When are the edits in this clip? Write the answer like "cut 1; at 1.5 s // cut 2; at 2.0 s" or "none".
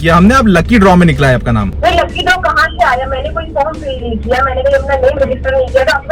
cut 1; at 1.7 s